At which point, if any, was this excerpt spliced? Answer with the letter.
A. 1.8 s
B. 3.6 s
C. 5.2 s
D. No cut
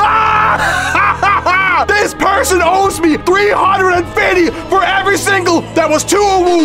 A